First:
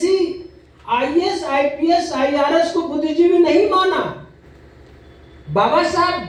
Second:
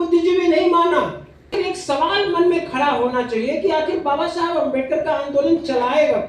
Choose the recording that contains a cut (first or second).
second